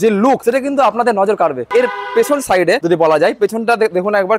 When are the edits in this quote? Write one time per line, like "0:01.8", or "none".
0:01.7